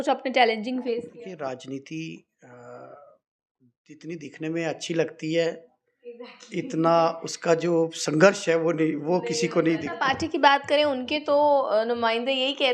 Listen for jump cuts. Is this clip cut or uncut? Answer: cut